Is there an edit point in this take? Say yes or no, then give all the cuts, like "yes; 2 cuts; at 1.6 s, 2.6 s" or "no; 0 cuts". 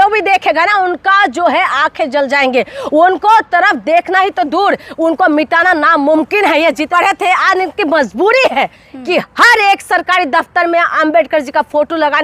yes; 1 cut; at 6.9 s